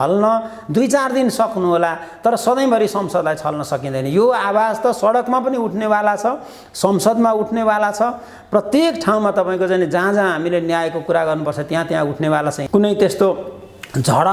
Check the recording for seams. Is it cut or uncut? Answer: cut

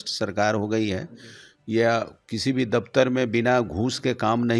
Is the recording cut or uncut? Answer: uncut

